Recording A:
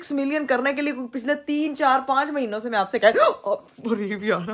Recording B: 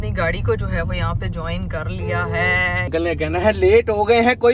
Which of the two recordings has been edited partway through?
B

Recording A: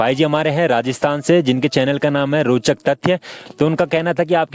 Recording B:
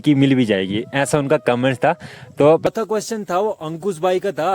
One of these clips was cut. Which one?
B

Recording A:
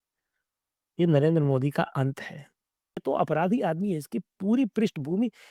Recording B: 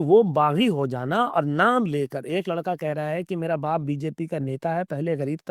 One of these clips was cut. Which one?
A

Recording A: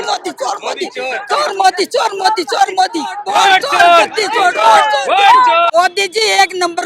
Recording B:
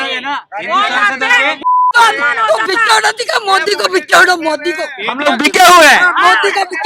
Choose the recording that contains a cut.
A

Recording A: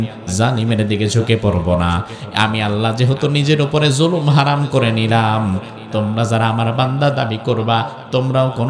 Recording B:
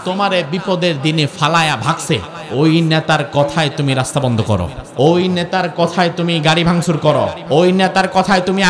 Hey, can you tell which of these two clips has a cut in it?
B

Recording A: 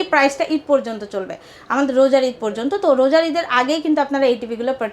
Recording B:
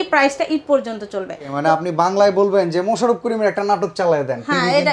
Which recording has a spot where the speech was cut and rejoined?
B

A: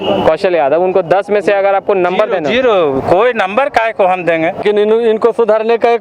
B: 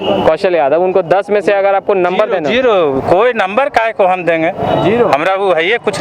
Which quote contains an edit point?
A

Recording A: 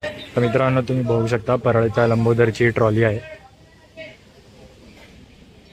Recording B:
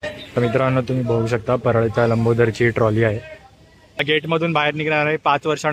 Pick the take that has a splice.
B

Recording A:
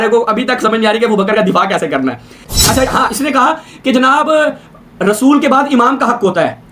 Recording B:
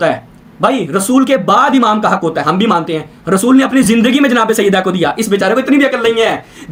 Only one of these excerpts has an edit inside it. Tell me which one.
A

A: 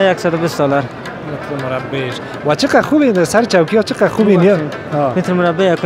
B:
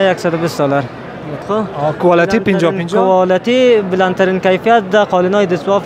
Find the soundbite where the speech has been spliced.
B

